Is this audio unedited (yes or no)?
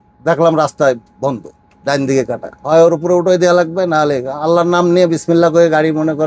no